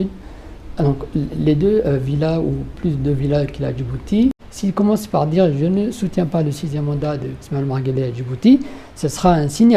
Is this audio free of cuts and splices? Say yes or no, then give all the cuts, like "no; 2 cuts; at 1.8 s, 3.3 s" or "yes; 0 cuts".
no; 1 cut; at 4.4 s